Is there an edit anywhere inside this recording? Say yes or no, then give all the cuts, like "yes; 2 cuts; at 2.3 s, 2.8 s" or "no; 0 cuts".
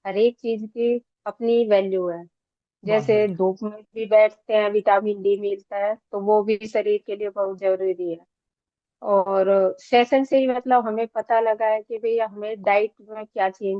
no; 0 cuts